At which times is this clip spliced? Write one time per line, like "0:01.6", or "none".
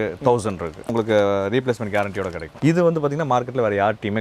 0:00.9
0:02.4